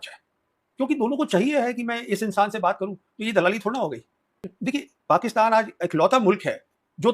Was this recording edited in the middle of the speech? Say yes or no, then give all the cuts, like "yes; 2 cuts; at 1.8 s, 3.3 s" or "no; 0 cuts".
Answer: yes; 1 cut; at 4.4 s